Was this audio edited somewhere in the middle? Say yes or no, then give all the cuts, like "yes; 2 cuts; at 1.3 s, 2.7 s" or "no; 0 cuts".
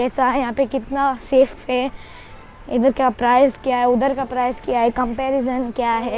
no; 0 cuts